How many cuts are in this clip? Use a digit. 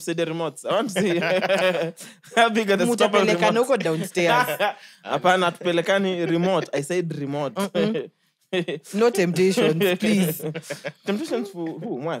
0